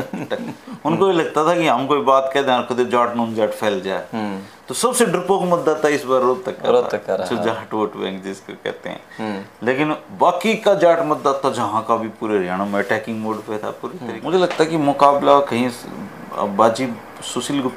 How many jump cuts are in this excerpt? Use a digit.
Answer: 1